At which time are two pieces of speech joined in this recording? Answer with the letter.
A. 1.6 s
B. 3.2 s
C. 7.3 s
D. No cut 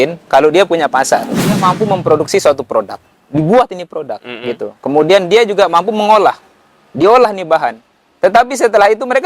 A